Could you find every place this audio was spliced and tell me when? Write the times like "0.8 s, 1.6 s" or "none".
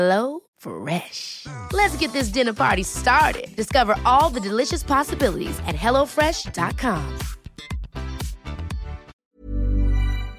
9.2 s